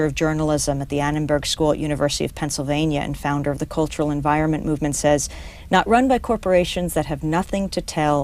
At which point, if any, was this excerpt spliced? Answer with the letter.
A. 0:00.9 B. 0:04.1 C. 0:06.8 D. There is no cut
A